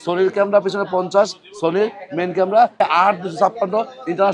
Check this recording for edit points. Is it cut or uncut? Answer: cut